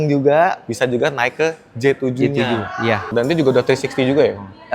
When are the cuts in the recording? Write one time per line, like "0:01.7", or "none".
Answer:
0:03.1